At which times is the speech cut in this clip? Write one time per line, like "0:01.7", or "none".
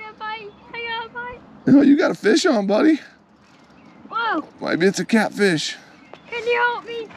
none